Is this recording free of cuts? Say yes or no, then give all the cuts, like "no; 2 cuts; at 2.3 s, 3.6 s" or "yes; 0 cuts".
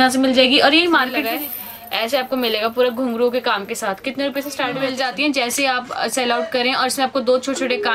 no; 2 cuts; at 1.2 s, 4.9 s